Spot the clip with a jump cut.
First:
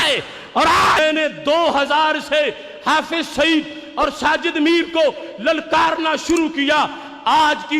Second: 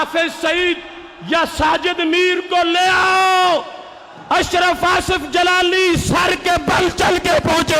first; 1 cut; at 1.0 s

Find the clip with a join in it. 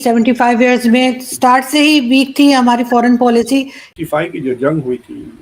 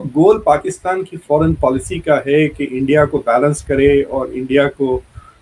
first; 1 cut; at 3.8 s

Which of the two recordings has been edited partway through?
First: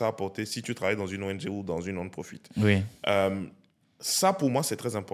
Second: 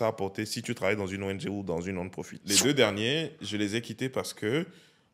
second; 1 cut; at 2.3 s

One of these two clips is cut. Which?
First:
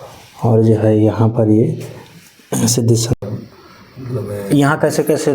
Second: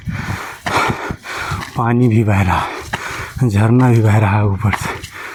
first; 1 cut; at 3.1 s

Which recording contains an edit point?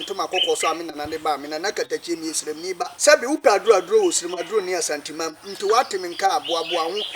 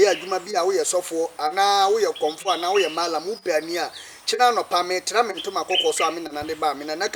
first; 1 cut; at 2.9 s

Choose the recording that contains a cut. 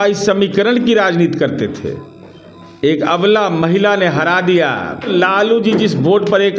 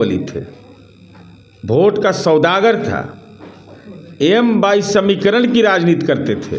first; 1 cut; at 5.1 s

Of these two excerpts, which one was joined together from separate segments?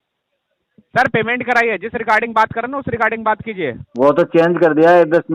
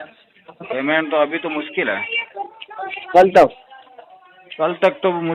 first; 1 cut; at 3.8 s

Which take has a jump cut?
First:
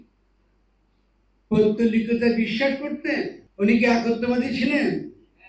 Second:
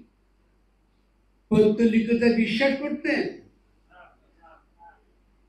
first; 1 cut; at 3.4 s

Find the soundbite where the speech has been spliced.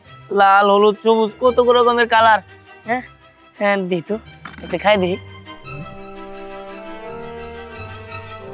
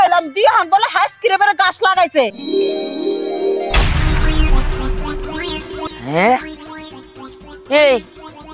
second; 2 cuts; at 2.4 s, 5.9 s

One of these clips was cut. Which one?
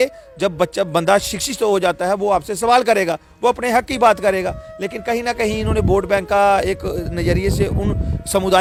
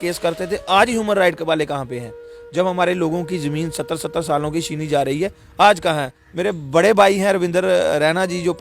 second; 1 cut; at 6.2 s

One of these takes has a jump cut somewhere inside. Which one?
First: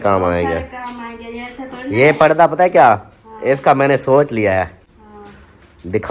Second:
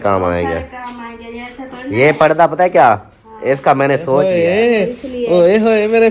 second; 1 cut; at 4.3 s

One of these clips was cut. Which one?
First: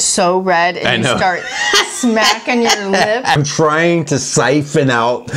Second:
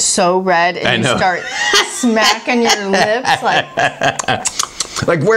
first; 1 cut; at 3.4 s

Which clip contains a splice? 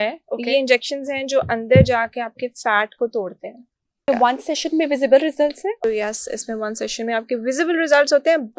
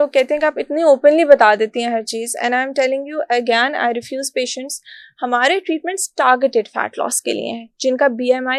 first; 2 cuts; at 4.1 s, 5.8 s

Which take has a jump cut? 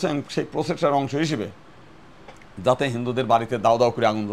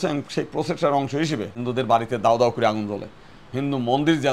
second; 1 cut; at 1.6 s

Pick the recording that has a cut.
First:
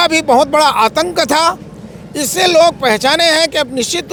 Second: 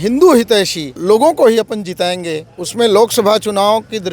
second; 1 cut; at 1.0 s

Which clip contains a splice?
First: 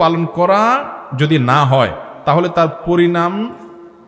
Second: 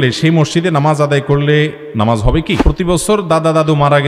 second; 1 cut; at 2.6 s

